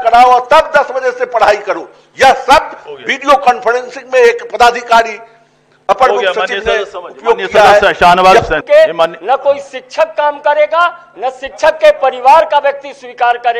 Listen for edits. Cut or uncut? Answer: cut